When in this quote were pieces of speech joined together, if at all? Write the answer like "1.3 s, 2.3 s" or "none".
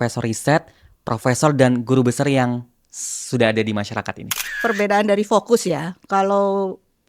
4.6 s